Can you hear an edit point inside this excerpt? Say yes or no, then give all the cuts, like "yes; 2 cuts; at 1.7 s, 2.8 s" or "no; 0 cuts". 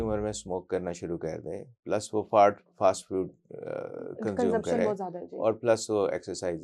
no; 0 cuts